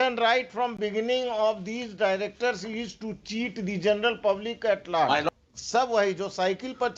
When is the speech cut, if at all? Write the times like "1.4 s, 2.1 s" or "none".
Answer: 5.3 s